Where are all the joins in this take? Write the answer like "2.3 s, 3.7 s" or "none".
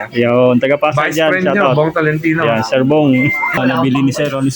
3.6 s